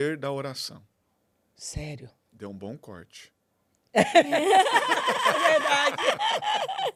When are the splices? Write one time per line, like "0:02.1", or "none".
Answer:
none